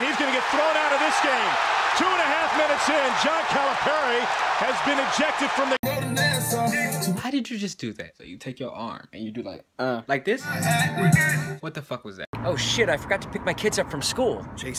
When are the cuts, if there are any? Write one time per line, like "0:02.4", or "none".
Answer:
0:01.1

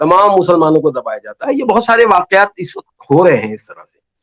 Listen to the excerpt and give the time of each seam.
none

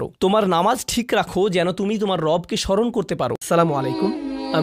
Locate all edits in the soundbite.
0:03.4

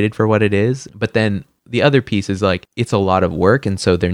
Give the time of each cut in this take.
0:00.9
0:02.7

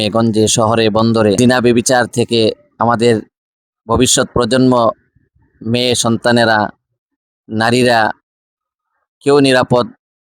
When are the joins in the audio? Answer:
0:01.4

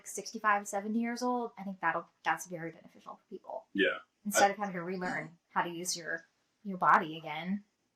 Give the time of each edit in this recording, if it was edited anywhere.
none

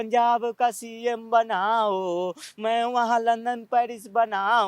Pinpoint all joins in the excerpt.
none

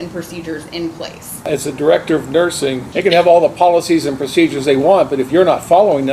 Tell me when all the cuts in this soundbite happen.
0:01.5
0:02.8

